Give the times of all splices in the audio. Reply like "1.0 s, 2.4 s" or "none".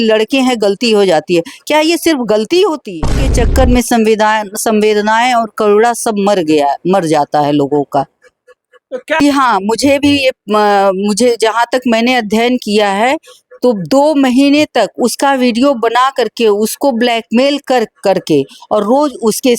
3.2 s, 9.2 s